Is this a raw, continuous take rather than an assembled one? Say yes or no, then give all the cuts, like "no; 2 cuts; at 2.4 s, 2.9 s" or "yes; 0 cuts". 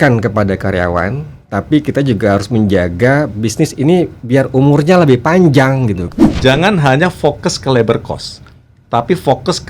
no; 1 cut; at 6.0 s